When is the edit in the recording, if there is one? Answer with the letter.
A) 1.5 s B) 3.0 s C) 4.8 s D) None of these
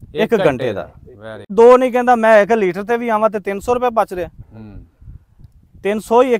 A